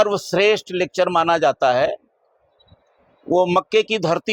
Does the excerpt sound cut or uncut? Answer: uncut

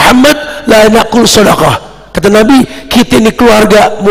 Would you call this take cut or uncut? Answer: uncut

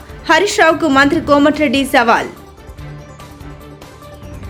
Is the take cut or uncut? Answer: uncut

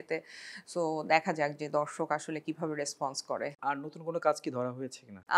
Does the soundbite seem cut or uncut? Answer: uncut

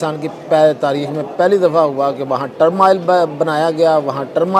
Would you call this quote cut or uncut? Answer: uncut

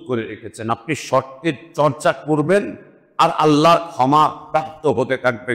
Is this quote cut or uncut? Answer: uncut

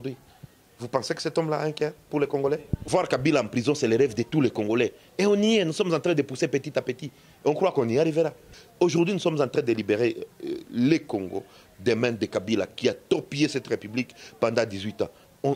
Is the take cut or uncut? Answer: cut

